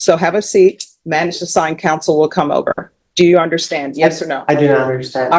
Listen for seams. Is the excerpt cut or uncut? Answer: uncut